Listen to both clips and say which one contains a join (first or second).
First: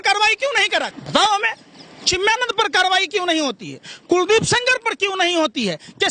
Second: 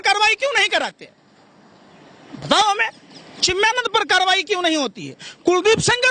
first